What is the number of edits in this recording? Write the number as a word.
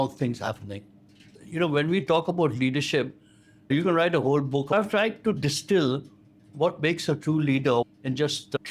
three